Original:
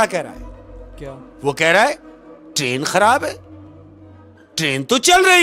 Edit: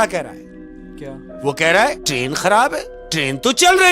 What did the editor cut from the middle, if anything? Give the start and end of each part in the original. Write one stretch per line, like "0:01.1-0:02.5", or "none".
0:02.0-0:02.5
0:03.5-0:04.4

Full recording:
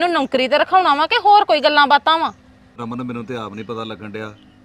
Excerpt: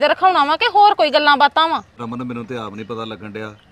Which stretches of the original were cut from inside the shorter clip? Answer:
0:02.4-0:02.7

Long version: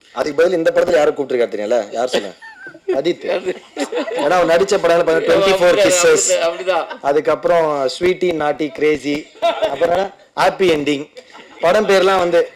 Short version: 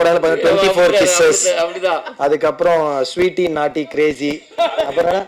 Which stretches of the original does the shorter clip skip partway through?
none

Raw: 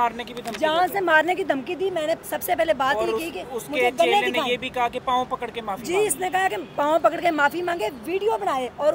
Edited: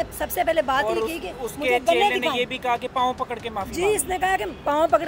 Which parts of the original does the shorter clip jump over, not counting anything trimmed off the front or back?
none

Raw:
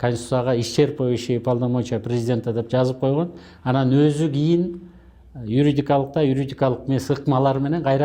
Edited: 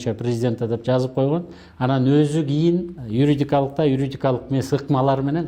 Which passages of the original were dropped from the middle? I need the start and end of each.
0:04.8-0:05.3

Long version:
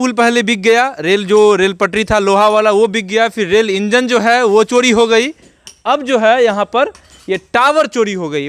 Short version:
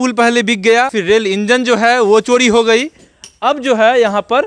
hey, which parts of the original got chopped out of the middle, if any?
0:01.0-0:03.4

